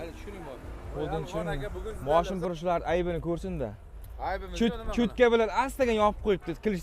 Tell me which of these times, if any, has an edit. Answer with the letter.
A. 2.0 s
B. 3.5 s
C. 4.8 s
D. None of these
A